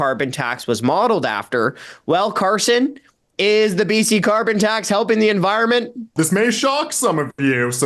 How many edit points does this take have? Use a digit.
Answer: 1